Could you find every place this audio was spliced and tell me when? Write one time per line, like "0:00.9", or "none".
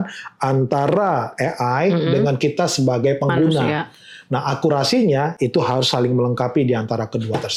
none